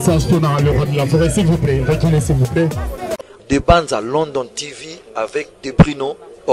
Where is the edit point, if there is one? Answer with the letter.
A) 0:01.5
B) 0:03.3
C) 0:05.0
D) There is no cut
B